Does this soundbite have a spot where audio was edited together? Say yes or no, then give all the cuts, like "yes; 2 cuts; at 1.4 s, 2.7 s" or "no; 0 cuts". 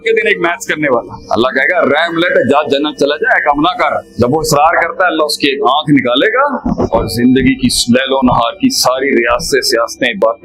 yes; 3 cuts; at 1.2 s, 4.1 s, 6.7 s